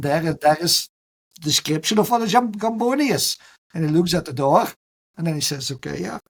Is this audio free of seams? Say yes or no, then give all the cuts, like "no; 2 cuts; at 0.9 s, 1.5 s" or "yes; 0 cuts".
yes; 0 cuts